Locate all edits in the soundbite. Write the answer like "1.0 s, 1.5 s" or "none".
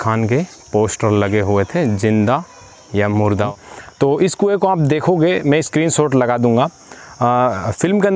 3.5 s